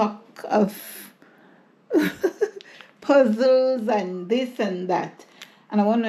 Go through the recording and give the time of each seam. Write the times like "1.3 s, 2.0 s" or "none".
none